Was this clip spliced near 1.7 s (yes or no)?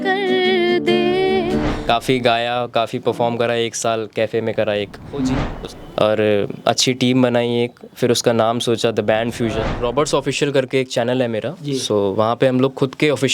yes